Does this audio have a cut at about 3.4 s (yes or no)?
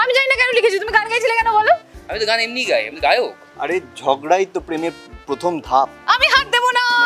yes